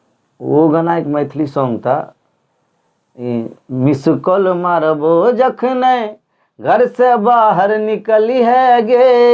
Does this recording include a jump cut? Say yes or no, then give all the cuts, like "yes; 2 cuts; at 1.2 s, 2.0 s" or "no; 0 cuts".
no; 0 cuts